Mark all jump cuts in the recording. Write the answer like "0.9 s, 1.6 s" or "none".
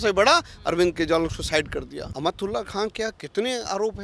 2.0 s